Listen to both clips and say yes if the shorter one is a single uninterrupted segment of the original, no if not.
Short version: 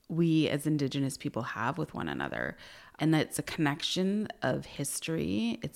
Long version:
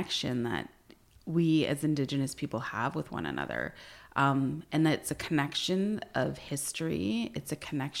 no